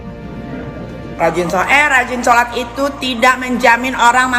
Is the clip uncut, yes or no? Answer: no